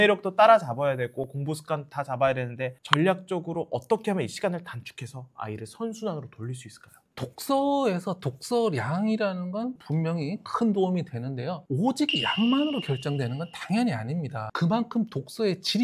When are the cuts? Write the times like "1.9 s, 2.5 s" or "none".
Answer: 9.8 s, 14.4 s